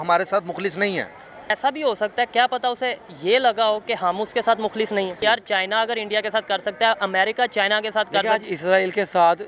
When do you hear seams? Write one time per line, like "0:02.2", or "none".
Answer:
0:01.5
0:05.2